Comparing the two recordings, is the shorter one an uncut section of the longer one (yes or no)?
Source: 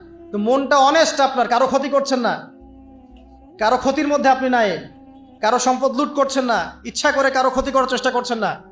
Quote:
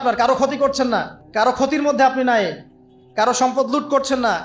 no